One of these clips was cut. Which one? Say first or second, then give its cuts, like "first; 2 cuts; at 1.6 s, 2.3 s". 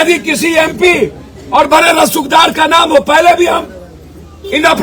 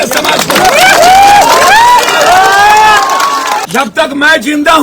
second; 1 cut; at 3.6 s